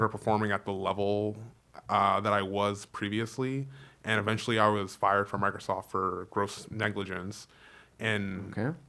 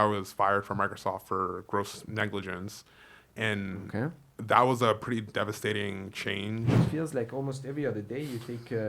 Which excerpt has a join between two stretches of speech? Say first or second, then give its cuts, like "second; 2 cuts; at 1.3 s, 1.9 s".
second; 1 cut; at 6.8 s